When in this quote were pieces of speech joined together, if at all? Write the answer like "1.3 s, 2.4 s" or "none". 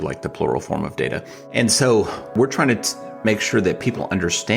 1.4 s, 2.3 s